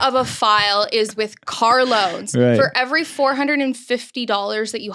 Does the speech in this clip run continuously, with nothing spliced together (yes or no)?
yes